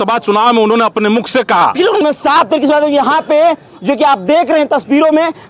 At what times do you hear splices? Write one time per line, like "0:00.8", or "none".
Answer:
0:02.0